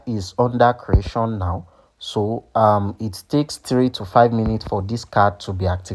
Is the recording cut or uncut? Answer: uncut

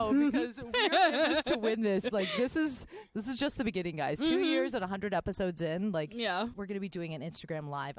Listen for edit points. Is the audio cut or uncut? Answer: cut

